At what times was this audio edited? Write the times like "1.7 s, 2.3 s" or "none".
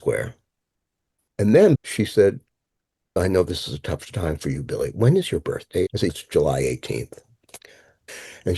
1.8 s, 3.2 s, 6.0 s